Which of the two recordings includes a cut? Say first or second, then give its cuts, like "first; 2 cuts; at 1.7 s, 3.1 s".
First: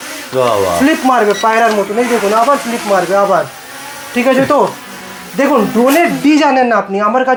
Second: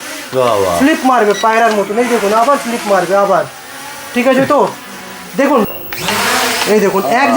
second; 1 cut; at 5.7 s